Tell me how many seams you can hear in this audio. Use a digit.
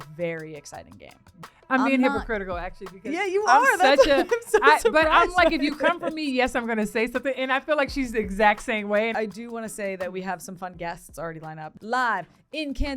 3